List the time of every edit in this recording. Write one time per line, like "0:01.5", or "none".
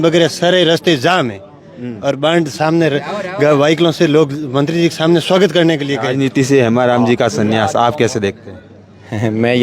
0:06.4